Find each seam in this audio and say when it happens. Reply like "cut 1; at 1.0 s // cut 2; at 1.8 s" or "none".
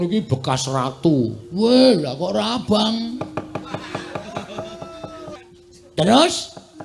cut 1; at 5.4 s